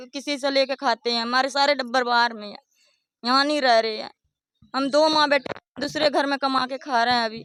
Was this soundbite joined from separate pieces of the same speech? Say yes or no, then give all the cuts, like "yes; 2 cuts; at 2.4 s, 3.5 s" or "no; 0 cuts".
no; 0 cuts